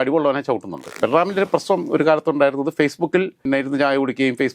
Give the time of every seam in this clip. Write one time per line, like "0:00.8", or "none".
0:01.0
0:03.4